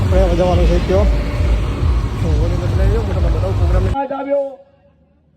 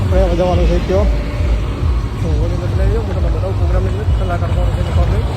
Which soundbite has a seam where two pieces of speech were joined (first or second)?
first